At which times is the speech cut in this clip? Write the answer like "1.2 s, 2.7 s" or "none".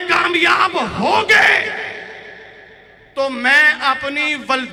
none